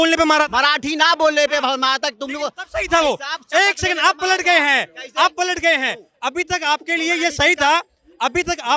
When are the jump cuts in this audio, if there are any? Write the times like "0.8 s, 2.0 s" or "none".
none